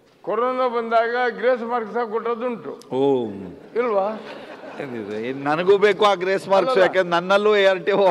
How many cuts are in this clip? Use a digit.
0